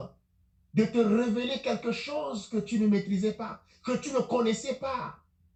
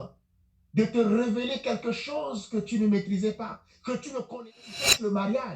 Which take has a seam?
second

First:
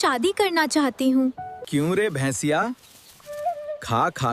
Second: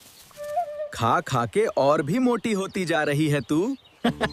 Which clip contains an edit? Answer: first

